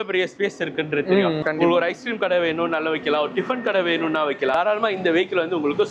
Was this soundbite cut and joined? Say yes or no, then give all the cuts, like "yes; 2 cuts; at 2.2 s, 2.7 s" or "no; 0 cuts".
yes; 2 cuts; at 1.4 s, 4.6 s